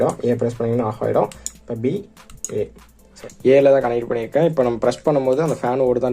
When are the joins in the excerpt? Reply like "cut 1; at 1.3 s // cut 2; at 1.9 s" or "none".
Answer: cut 1; at 3.1 s